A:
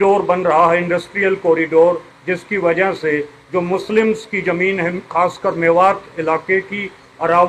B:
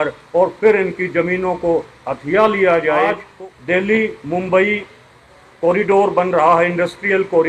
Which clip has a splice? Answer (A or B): B